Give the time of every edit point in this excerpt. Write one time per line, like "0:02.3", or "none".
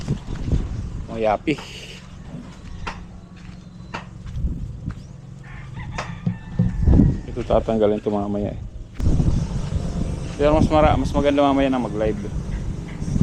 0:09.0